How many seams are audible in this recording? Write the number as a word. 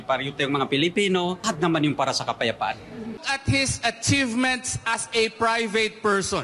two